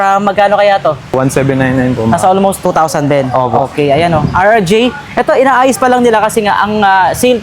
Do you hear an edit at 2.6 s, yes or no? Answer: yes